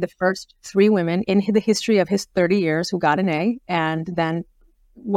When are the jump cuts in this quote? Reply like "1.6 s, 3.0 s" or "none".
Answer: 1.2 s